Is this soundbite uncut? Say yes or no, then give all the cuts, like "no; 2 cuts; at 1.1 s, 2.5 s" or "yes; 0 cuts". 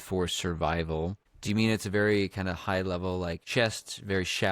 no; 2 cuts; at 1.3 s, 3.4 s